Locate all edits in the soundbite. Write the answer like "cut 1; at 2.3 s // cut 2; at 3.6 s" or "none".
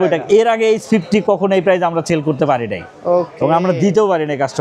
none

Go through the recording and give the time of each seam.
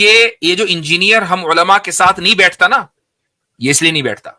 none

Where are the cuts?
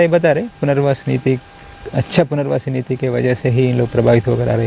none

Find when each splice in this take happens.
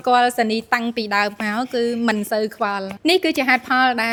none

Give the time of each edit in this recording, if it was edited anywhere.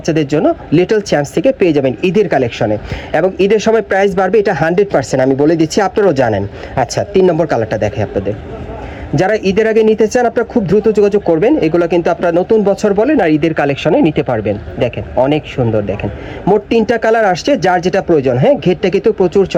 none

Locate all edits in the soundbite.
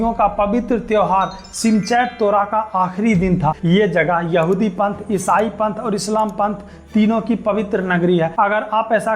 cut 1; at 3.6 s // cut 2; at 8.3 s

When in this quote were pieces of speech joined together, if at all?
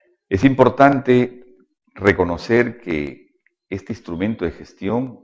cut 1; at 2.5 s

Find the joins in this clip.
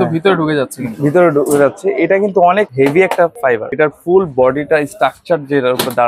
cut 1; at 2.7 s // cut 2; at 3.5 s

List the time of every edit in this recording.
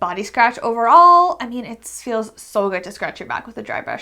none

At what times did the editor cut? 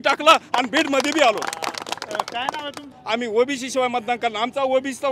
cut 1; at 2.9 s

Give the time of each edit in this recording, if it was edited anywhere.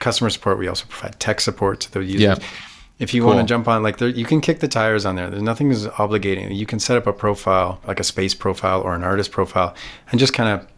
cut 1; at 7.9 s

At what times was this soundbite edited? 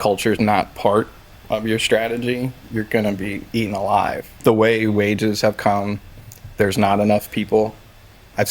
cut 1; at 2.6 s // cut 2; at 4.4 s

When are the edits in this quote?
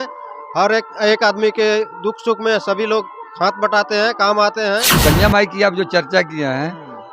cut 1; at 4.9 s

